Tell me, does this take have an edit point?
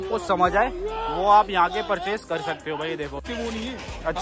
yes; 1 cut; at 3.2 s

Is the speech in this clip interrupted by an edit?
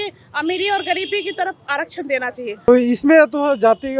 yes; 1 cut; at 2.7 s

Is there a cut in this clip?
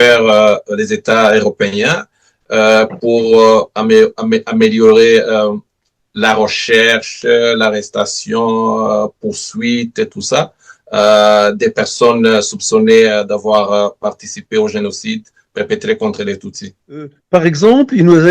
yes; 1 cut; at 17.2 s

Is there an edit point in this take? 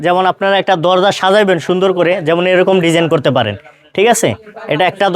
no; 0 cuts

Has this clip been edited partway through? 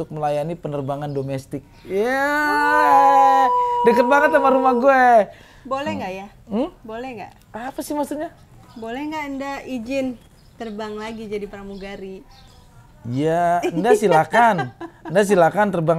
no; 0 cuts

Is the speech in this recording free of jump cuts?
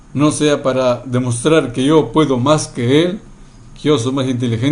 yes; 0 cuts

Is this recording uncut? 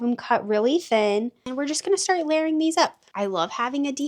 no; 2 cuts; at 1.4 s, 3.0 s

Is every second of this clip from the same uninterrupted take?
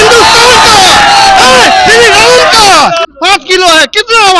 no; 1 cut; at 3.1 s

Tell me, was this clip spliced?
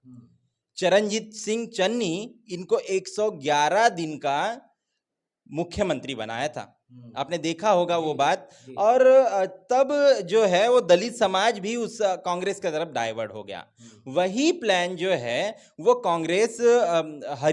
no; 0 cuts

